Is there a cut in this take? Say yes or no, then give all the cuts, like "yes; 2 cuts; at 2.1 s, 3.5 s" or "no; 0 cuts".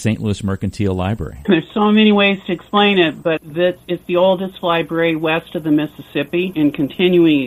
no; 0 cuts